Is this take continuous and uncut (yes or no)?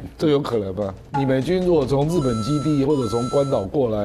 no